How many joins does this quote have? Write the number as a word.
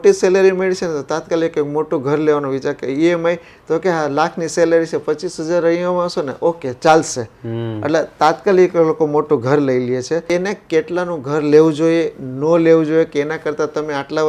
one